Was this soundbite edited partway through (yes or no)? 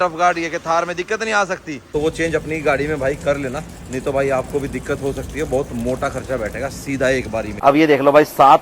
yes